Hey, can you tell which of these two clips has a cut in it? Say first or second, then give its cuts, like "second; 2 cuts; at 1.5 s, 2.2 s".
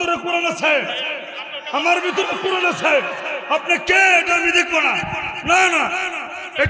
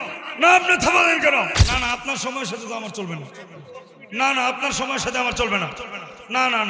second; 1 cut; at 1.6 s